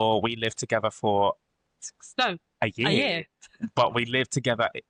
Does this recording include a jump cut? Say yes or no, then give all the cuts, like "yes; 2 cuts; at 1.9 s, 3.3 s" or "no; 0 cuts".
no; 0 cuts